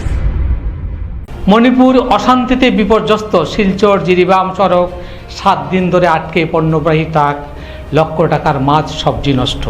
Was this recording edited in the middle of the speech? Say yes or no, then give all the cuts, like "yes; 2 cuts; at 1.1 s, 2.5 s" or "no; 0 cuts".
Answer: yes; 1 cut; at 1.2 s